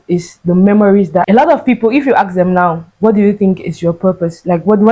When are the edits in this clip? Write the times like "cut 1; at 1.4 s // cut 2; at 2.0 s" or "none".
cut 1; at 1.3 s